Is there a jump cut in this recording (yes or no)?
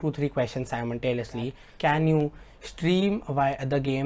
yes